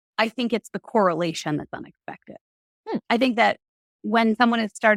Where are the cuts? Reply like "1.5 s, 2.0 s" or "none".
none